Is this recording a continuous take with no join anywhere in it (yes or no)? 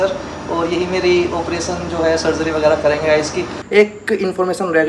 no